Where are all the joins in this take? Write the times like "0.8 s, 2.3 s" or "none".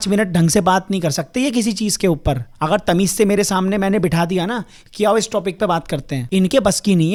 none